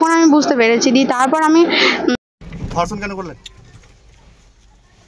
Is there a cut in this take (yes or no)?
yes